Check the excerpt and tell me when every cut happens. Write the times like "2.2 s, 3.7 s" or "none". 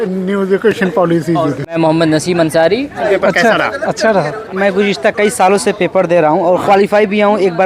1.5 s, 3.0 s, 4.5 s, 6.6 s